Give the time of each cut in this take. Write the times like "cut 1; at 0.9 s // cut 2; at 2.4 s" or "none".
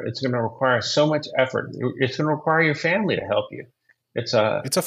none